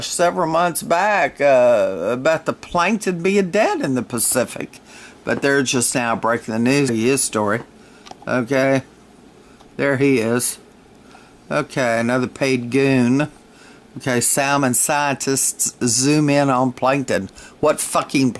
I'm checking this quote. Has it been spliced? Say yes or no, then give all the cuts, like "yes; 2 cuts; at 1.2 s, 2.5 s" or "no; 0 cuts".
no; 0 cuts